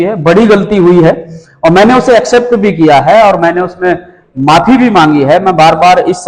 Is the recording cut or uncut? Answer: uncut